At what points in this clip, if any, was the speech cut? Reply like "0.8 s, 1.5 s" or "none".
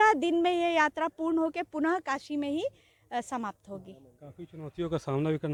none